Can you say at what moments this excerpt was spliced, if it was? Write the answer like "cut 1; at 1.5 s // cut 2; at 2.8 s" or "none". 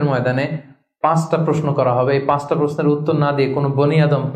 none